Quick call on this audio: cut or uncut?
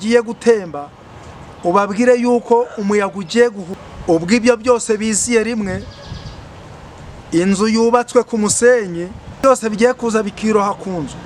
cut